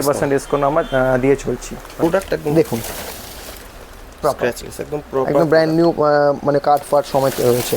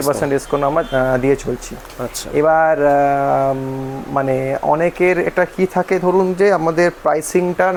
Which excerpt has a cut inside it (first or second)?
first